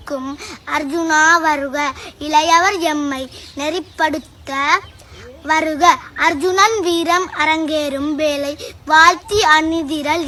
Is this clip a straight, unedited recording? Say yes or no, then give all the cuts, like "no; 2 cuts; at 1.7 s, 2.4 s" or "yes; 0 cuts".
yes; 0 cuts